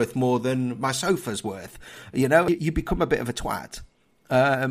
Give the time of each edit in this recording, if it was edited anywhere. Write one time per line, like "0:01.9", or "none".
0:02.5

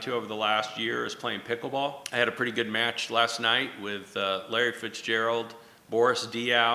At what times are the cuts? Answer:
0:02.0

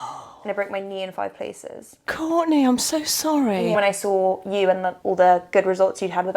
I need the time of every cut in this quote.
0:02.1
0:03.8
0:04.9

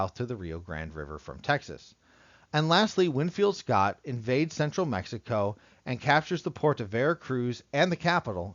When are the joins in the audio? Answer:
0:02.7

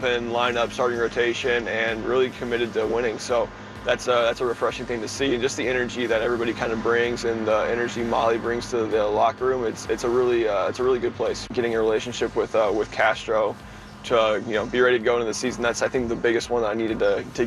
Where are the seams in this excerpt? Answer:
0:11.4

